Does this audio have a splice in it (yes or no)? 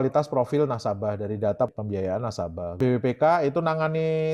no